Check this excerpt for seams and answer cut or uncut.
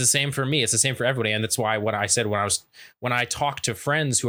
uncut